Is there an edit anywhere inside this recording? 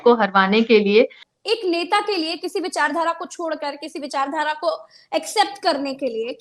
yes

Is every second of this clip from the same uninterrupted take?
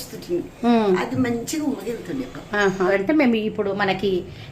no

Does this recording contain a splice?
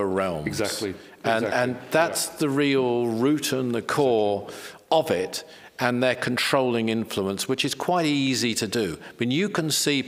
no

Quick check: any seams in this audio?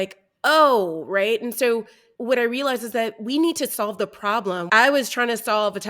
yes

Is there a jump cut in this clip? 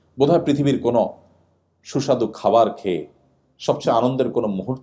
no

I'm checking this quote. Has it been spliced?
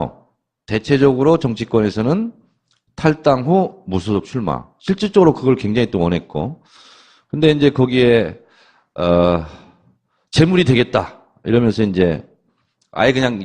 yes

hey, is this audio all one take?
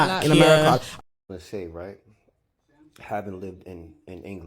no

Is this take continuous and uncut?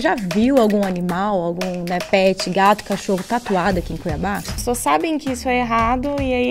no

